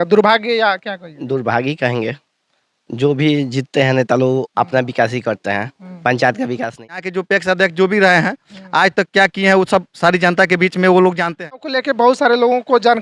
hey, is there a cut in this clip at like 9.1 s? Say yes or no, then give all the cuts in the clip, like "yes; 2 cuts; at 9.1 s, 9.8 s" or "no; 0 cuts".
no; 2 cuts; at 7.1 s, 11.7 s